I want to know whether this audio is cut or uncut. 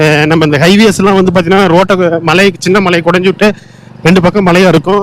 uncut